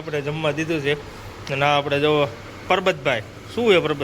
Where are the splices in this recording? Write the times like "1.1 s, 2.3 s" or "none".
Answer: none

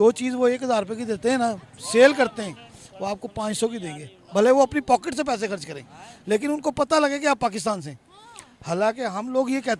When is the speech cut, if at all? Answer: none

